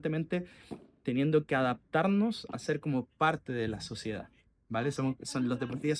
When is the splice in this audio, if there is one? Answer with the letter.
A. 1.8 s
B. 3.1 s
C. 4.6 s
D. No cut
D